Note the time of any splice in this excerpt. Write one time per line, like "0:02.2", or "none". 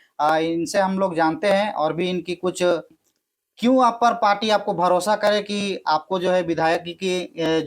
0:02.9

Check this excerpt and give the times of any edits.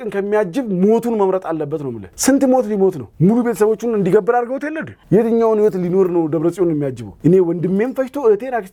none

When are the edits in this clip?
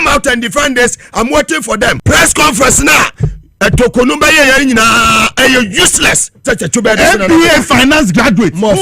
0:02.0
0:06.5

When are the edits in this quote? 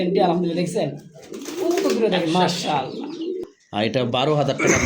0:03.4

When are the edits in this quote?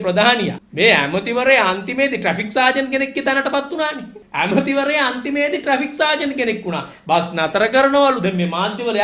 none

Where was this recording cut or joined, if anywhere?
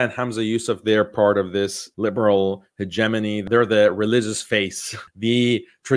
0:01.8
0:03.4
0:05.0

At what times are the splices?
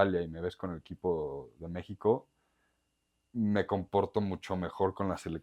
none

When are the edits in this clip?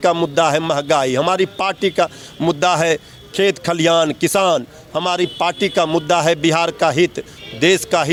none

